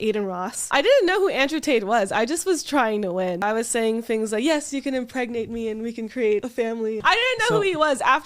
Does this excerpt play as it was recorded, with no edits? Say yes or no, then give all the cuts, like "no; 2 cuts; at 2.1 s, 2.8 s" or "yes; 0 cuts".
no; 3 cuts; at 0.7 s, 3.4 s, 6.9 s